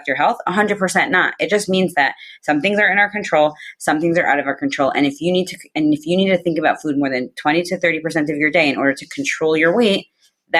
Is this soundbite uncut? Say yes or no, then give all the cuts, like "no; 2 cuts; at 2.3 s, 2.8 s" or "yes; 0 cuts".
yes; 0 cuts